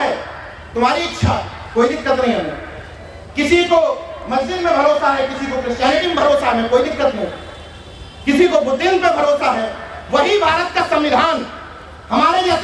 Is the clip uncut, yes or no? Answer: yes